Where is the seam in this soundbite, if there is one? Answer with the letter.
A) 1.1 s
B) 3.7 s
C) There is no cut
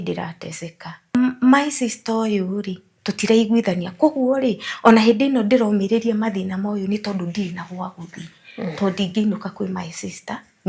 A